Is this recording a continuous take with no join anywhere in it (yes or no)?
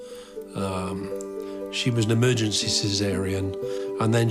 no